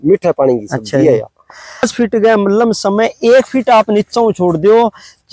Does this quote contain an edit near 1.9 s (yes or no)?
yes